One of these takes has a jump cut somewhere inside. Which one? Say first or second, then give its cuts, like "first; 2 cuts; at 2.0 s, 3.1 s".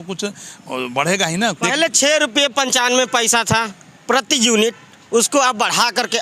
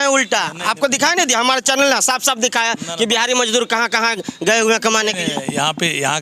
first; 1 cut; at 1.6 s